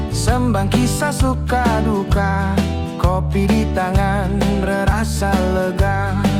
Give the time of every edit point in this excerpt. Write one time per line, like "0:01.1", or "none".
none